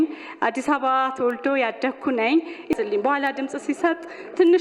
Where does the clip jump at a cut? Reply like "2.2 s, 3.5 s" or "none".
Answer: 2.7 s